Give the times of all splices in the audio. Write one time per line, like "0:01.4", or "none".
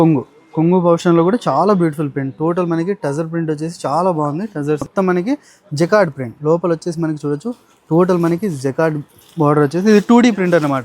0:04.9